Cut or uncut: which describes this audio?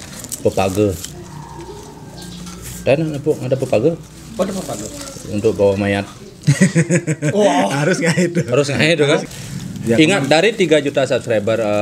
cut